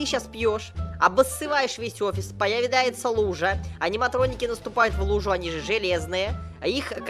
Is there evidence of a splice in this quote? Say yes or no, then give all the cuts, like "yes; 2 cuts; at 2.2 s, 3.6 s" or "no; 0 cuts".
no; 0 cuts